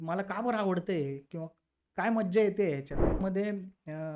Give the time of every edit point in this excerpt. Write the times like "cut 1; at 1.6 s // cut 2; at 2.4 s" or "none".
cut 1; at 3.2 s